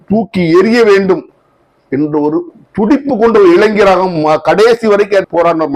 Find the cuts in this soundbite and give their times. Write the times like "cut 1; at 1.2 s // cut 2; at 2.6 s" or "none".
none